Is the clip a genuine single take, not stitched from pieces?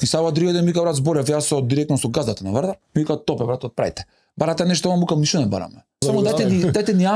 no; 2 cuts; at 2.8 s, 6.0 s

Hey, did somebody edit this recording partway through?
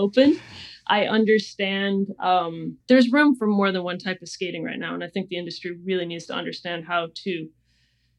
no; 0 cuts

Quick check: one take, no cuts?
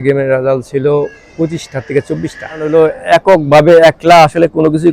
no; 1 cut; at 2.7 s

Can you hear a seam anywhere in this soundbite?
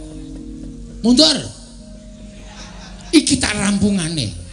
yes; 1 cut; at 2.4 s

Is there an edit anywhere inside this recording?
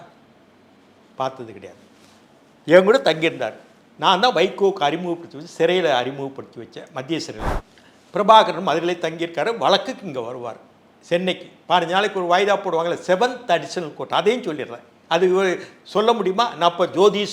yes; 1 cut; at 7.5 s

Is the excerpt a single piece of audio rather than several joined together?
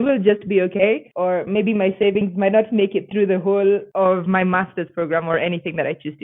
yes; 0 cuts

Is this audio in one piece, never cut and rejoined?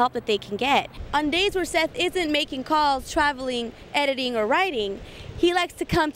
no; 1 cut; at 1.0 s

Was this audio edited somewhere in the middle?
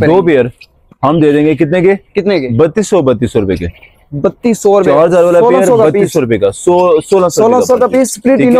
no; 0 cuts

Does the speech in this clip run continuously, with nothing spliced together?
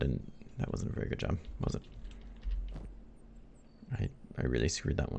yes; 0 cuts

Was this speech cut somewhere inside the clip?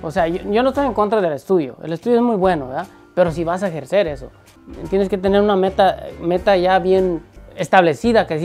no; 0 cuts

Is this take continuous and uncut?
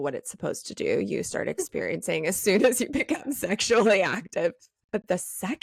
yes; 0 cuts

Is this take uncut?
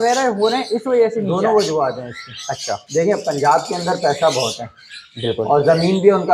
yes; 0 cuts

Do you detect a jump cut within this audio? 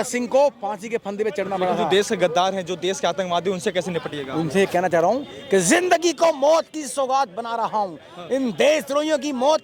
yes; 1 cut; at 1.8 s

